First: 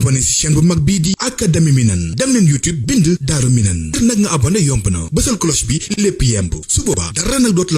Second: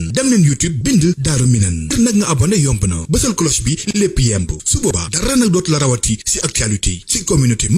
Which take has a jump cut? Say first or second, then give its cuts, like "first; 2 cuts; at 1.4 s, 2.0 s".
first; 1 cut; at 1.1 s